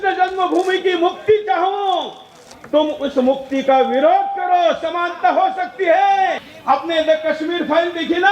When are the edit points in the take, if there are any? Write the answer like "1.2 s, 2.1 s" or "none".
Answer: 6.5 s